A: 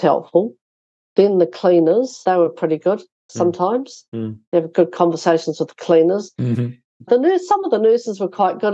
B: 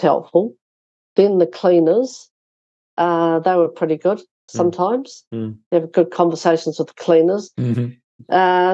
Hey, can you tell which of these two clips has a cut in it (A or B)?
A